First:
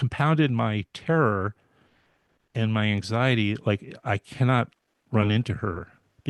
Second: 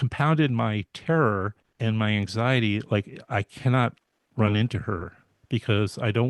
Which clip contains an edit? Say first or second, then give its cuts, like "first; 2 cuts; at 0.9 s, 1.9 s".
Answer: second; 1 cut; at 1.6 s